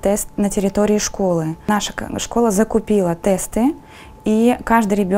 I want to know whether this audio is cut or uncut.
uncut